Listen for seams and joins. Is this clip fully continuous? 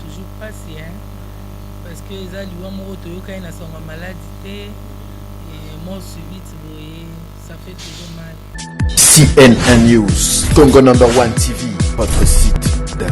no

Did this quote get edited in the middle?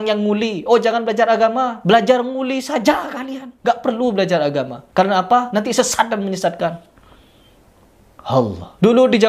no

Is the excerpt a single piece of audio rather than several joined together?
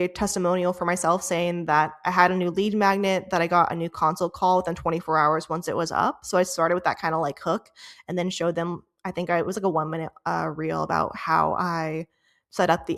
yes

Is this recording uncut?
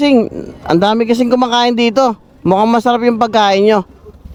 yes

